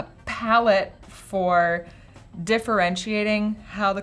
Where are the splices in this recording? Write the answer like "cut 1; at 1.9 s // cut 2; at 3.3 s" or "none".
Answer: none